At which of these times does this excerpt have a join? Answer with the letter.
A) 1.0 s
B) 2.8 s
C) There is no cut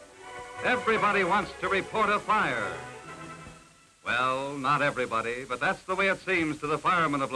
A